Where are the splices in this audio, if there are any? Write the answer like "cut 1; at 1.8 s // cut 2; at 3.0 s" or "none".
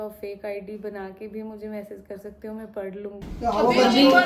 cut 1; at 3.2 s